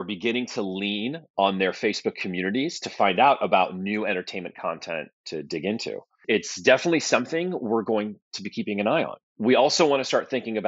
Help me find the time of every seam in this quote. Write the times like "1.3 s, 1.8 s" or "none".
6.2 s, 9.2 s